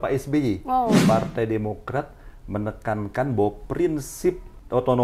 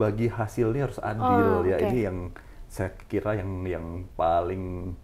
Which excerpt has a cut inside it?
first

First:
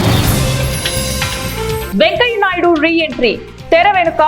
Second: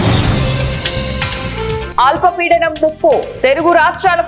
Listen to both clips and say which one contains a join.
second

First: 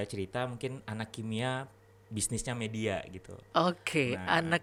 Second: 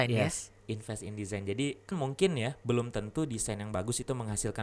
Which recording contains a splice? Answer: second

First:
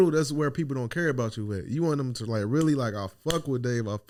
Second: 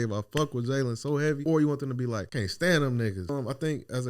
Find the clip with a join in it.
second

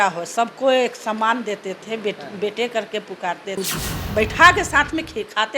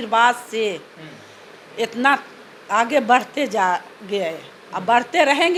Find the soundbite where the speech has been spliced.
first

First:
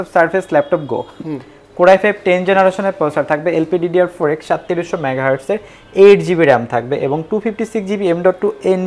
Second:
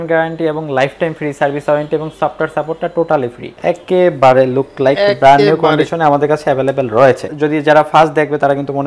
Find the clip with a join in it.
second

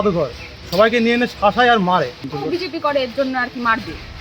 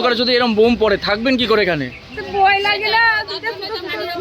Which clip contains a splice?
first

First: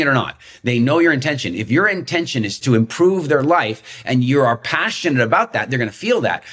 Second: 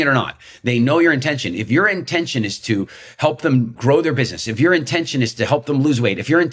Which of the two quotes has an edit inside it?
first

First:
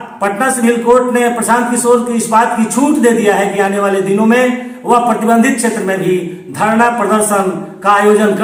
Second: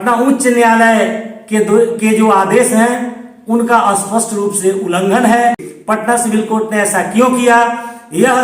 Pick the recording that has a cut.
second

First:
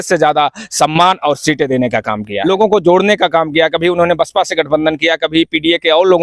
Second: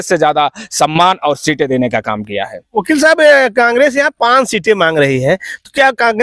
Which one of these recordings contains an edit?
first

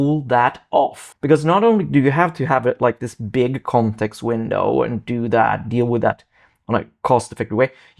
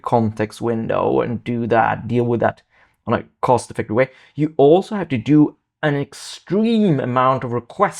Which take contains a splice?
first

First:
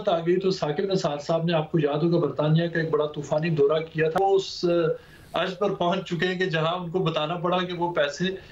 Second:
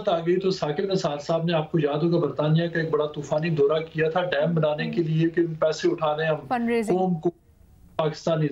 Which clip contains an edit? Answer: first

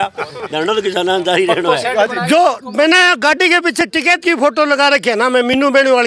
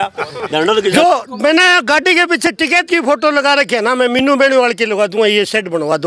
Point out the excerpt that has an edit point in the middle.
second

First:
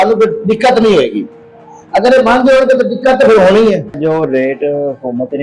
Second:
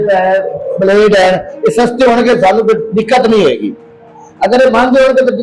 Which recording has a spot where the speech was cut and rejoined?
first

